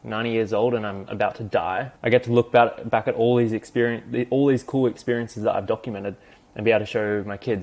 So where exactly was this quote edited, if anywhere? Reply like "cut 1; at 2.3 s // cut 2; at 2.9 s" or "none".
cut 1; at 1.9 s